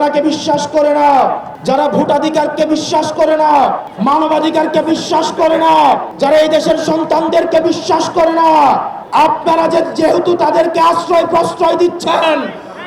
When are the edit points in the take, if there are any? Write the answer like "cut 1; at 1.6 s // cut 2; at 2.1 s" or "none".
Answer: cut 1; at 1.5 s // cut 2; at 3.9 s // cut 3; at 6.1 s // cut 4; at 9.0 s